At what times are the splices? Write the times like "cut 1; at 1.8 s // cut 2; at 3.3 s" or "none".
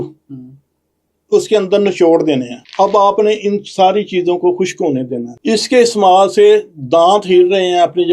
cut 1; at 2.6 s // cut 2; at 5.3 s